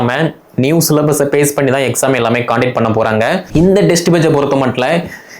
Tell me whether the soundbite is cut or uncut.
cut